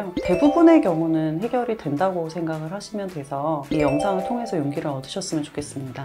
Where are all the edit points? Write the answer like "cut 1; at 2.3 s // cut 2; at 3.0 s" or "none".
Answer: cut 1; at 3.6 s